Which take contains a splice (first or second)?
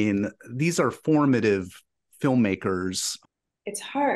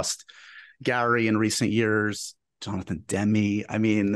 first